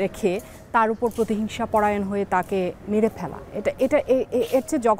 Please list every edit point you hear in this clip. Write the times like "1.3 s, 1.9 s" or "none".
none